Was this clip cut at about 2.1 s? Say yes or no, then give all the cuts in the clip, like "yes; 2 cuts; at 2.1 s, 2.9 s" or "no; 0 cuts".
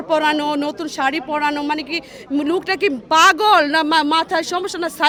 no; 0 cuts